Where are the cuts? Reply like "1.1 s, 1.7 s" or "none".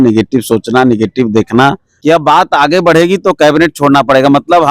1.9 s